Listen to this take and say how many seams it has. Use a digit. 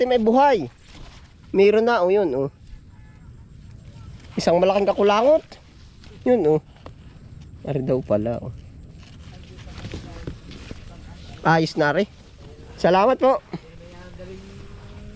0